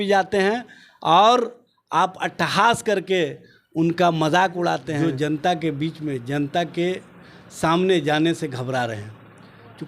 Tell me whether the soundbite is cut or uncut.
cut